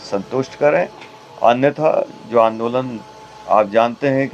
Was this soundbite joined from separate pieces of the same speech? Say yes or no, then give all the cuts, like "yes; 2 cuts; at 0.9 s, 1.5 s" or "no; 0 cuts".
no; 0 cuts